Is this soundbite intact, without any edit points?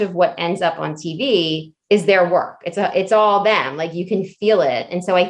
yes; 0 cuts

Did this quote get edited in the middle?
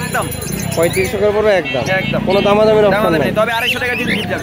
no; 0 cuts

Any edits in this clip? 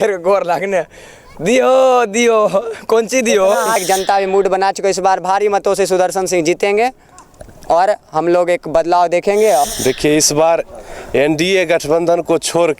yes; 2 cuts; at 3.8 s, 9.6 s

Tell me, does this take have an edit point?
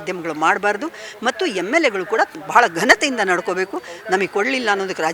no; 0 cuts

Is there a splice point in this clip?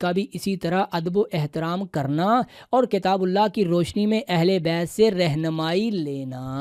no; 0 cuts

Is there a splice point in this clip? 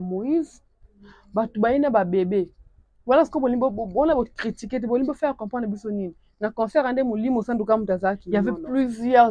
yes; 1 cut; at 8.2 s

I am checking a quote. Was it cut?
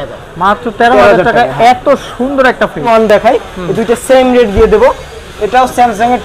yes; 1 cut; at 2.8 s

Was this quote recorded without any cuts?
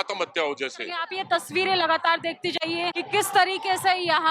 no; 2 cuts; at 1.1 s, 3.0 s

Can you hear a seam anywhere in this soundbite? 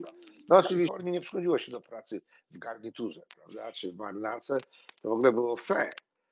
yes; 1 cut; at 0.9 s

